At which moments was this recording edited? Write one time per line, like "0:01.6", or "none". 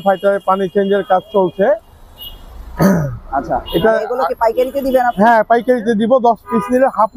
none